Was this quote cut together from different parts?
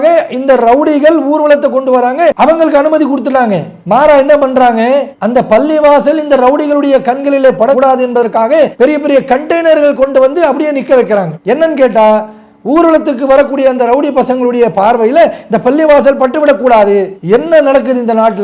no; 0 cuts

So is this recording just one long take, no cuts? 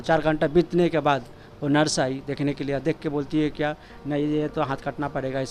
yes; 0 cuts

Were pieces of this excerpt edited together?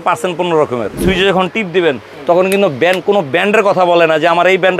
yes; 1 cut; at 1.0 s

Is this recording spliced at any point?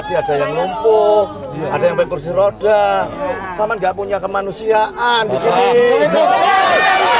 no; 0 cuts

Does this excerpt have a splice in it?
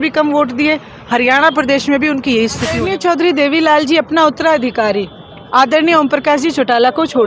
yes; 1 cut; at 2.8 s

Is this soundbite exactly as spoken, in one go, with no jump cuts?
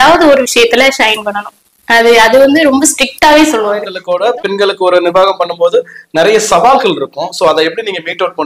no; 1 cut; at 4.3 s

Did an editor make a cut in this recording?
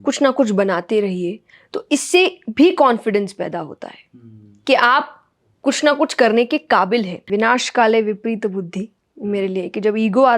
yes; 1 cut; at 7.3 s

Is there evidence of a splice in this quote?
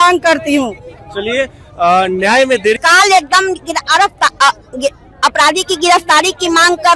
yes; 1 cut; at 2.8 s

